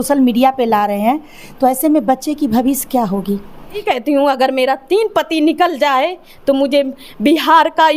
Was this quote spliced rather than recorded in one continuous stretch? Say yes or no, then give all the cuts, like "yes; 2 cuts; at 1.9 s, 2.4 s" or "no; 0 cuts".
yes; 1 cut; at 3.8 s